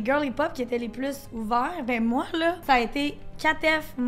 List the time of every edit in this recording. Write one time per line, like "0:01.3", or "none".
0:02.6